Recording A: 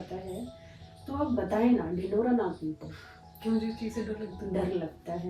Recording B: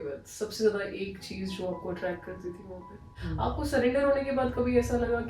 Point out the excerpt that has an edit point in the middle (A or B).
B